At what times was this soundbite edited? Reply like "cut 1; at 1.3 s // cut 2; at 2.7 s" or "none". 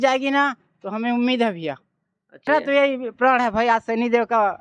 cut 1; at 2.5 s